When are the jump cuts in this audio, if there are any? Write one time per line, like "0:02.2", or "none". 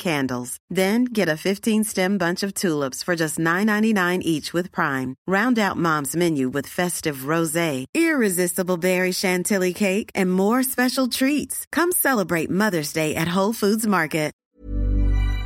0:14.4

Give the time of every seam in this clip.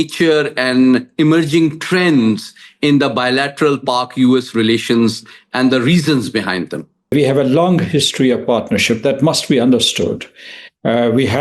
0:07.1

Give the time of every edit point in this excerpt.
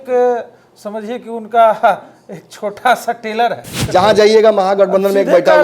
0:03.7

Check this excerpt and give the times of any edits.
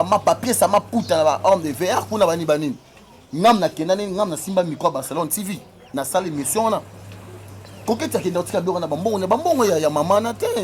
none

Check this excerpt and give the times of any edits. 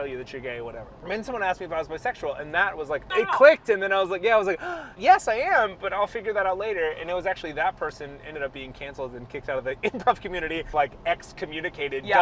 0:00.9
0:03.4
0:05.0
0:10.7

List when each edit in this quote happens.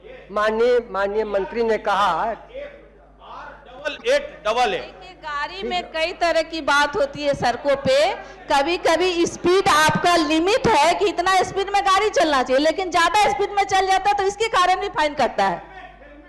none

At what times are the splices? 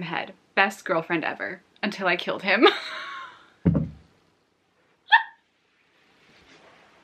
none

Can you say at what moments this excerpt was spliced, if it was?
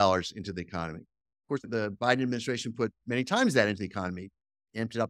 0:01.6

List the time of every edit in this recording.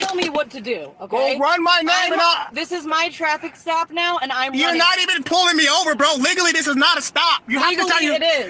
none

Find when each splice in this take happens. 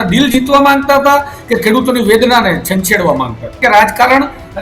0:03.5

